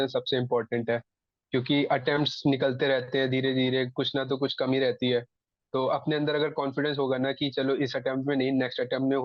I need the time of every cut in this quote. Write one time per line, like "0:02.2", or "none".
none